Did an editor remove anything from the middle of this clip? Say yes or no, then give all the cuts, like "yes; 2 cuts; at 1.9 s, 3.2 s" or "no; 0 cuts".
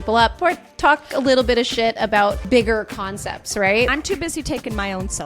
yes; 2 cuts; at 2.4 s, 3.9 s